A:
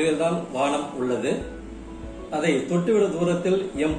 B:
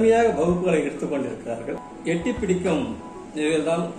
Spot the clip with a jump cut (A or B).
B